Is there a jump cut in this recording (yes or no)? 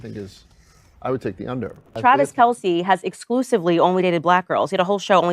yes